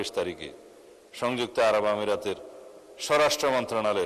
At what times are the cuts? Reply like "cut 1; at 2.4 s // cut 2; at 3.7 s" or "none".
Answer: none